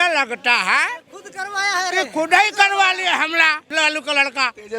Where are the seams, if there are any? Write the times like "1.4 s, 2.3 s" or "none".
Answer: 3.7 s